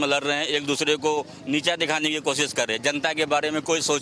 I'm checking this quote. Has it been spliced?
no; 0 cuts

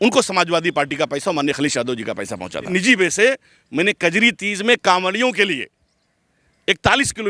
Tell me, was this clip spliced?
yes; 1 cut; at 2.7 s

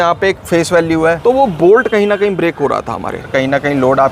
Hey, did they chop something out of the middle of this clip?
yes; 2 cuts; at 1.2 s, 2.9 s

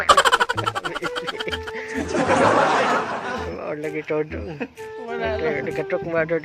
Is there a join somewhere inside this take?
no; 0 cuts

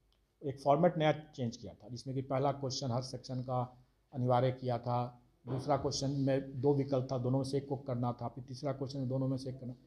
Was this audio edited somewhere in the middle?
no; 0 cuts

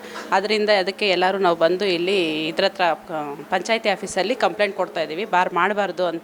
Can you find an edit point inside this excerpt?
no; 0 cuts

